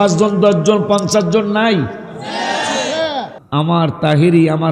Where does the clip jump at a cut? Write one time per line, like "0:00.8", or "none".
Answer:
0:03.4